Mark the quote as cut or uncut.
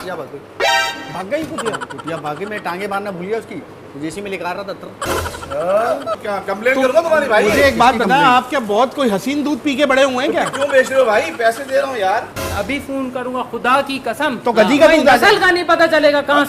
cut